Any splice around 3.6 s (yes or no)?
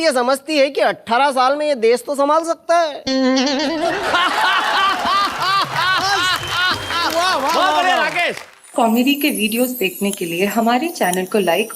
no